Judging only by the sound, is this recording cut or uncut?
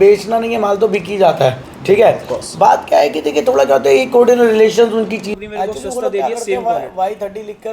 cut